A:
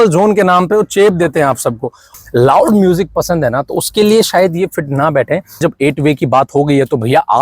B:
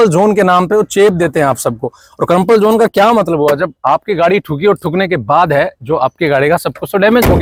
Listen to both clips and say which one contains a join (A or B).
A